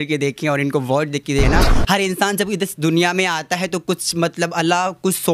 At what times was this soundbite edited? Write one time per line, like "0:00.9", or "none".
0:01.5